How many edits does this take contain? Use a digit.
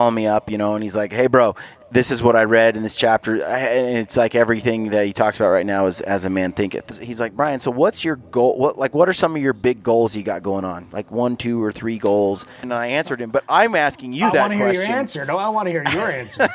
2